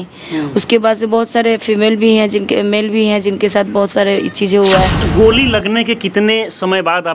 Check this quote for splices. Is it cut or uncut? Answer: cut